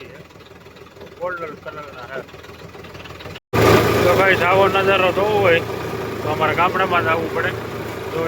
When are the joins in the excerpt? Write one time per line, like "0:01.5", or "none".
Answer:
0:03.4